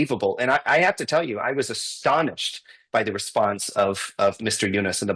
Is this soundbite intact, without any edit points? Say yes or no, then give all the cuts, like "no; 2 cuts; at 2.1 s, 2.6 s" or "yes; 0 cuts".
yes; 0 cuts